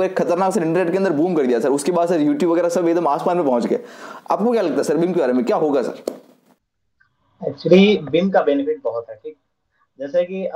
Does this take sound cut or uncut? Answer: uncut